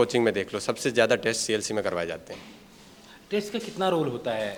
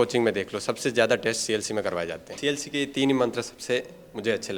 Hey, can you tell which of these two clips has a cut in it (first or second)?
second